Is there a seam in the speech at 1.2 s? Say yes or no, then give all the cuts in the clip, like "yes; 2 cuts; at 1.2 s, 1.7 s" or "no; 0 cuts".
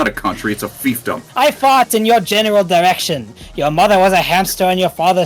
yes; 1 cut; at 1.2 s